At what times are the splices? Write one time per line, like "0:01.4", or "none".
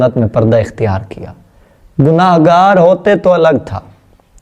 none